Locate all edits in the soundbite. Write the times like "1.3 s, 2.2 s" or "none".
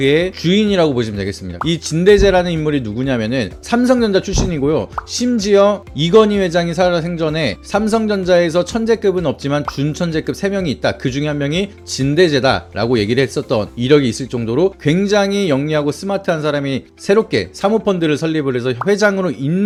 none

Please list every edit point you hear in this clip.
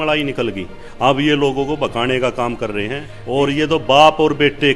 3.1 s

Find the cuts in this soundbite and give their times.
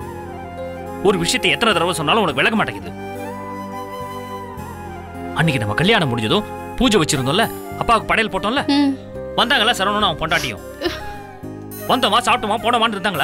none

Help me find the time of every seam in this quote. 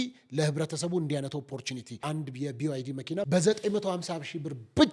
2.0 s, 3.3 s

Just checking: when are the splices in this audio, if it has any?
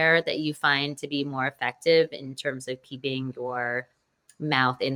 none

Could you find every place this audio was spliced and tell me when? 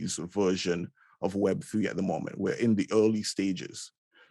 none

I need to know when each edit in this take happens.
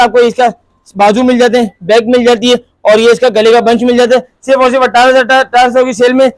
none

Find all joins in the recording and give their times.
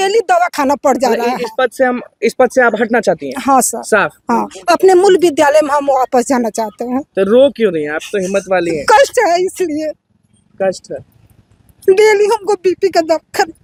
none

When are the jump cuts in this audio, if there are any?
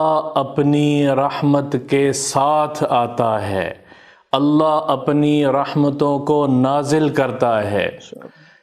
none

